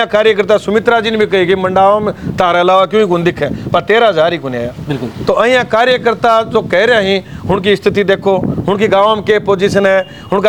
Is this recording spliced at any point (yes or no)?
no